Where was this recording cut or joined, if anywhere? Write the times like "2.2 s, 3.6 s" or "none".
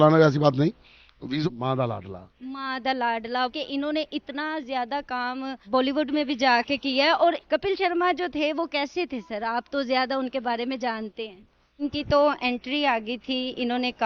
1.4 s, 11.8 s

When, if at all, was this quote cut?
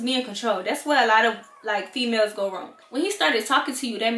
2.7 s

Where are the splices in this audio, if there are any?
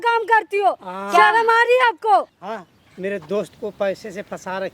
2.4 s

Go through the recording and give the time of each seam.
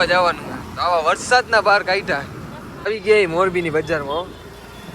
2.9 s

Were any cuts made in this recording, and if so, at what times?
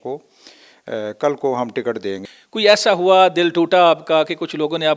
2.3 s

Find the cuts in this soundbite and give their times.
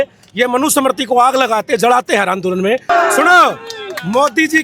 2.9 s

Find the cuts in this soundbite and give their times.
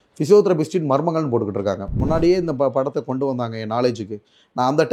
2.0 s

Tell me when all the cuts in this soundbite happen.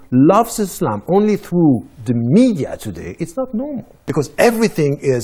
4.3 s

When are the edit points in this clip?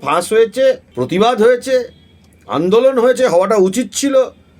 0.9 s

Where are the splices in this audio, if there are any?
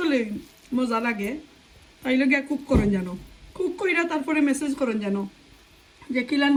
none

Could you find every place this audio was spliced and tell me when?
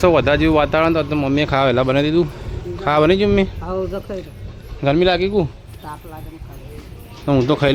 none

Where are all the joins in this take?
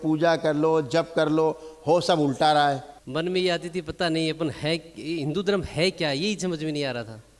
3.0 s

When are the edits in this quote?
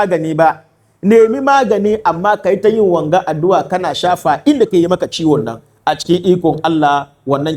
none

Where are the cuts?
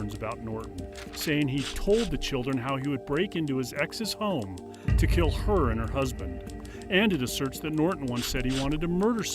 6.6 s

